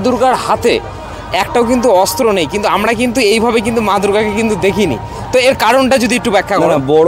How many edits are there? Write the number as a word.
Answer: zero